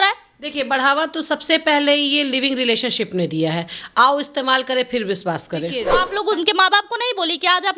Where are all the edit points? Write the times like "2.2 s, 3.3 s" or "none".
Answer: 6.0 s